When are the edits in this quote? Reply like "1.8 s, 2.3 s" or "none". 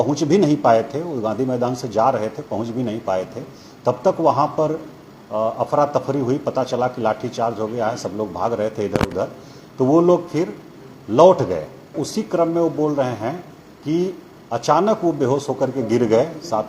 12.1 s